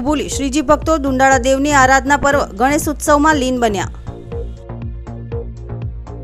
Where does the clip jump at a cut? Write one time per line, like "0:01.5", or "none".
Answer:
0:03.9
0:05.3